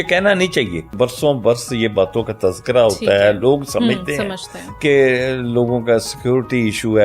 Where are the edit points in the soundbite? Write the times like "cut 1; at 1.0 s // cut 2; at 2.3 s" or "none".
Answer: cut 1; at 0.9 s

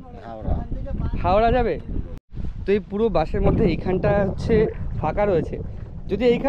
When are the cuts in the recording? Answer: cut 1; at 2.2 s

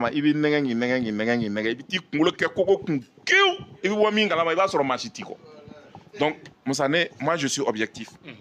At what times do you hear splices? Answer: none

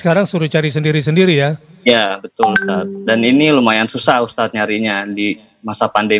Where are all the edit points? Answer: none

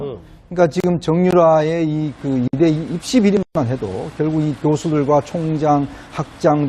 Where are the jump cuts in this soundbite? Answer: cut 1; at 4.4 s

